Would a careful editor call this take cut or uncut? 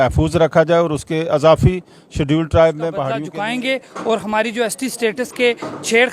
cut